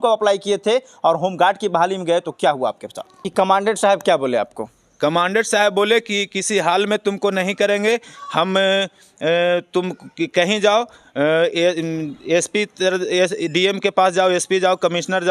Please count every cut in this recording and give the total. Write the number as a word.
one